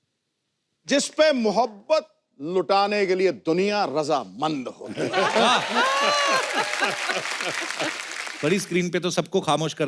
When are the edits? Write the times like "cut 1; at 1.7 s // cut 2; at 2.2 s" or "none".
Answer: cut 1; at 8.2 s